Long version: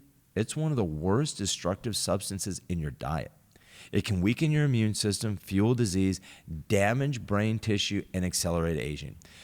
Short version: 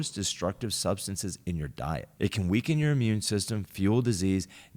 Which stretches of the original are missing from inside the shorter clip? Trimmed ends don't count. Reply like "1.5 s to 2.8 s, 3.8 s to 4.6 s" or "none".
3.3 s to 3.8 s